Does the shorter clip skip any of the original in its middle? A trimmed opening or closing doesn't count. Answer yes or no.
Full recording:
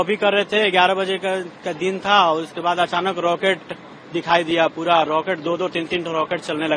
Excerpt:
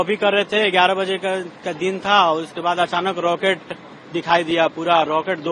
no